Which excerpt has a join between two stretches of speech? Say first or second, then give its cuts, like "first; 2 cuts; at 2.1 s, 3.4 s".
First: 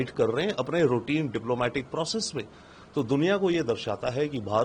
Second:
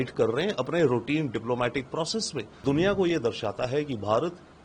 second; 1 cut; at 2.6 s